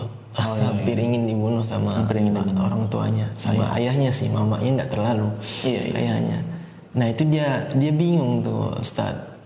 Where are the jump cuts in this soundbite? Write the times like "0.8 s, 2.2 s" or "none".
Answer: none

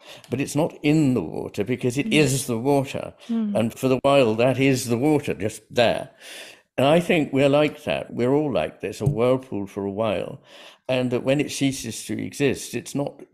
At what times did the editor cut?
9.0 s

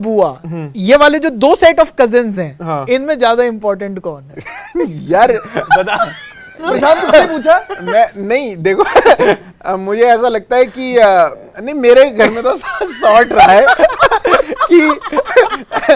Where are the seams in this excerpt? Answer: none

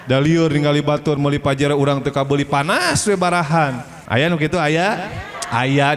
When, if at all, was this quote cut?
3.9 s

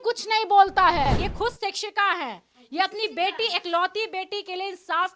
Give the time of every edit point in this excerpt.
1.2 s

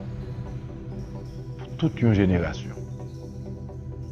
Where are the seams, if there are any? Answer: 3.0 s

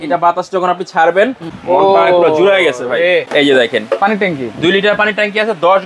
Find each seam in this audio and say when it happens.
1.5 s, 3.3 s

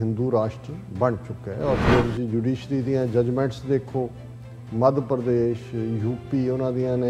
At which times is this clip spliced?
1.8 s

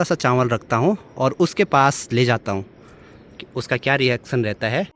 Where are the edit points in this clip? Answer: none

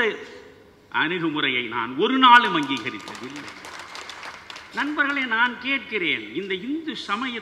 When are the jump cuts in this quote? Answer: 4.3 s

